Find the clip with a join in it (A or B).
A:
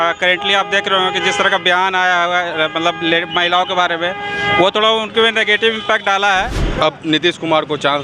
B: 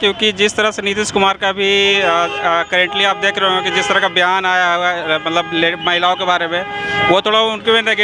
A